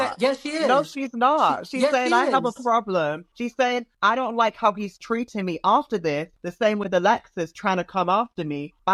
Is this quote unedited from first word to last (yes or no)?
yes